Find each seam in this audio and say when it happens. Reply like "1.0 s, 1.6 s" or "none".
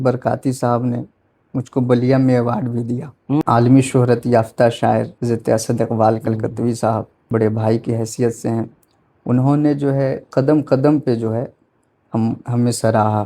3.4 s, 5.1 s, 7.1 s